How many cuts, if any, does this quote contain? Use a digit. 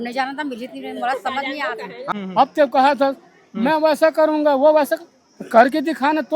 1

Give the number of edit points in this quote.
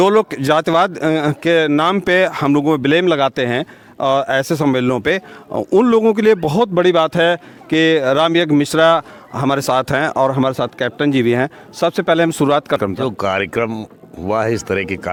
0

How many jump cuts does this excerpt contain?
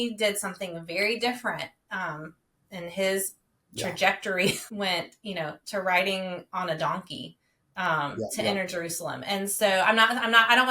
1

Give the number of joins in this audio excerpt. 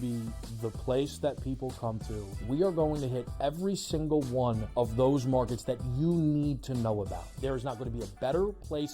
3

